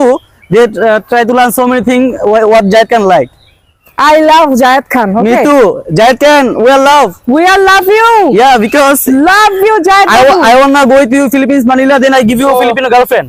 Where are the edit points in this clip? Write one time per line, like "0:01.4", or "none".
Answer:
none